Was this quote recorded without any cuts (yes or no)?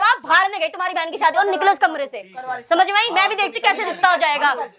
yes